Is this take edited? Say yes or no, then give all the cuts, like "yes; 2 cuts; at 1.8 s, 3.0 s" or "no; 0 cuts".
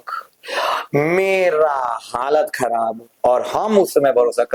no; 0 cuts